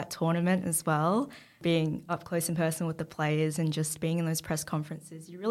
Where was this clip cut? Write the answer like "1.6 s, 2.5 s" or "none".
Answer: 1.6 s